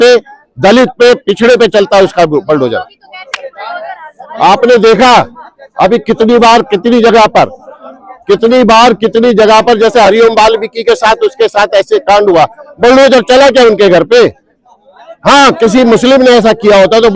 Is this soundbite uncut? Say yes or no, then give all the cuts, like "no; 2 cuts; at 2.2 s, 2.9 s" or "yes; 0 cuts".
yes; 0 cuts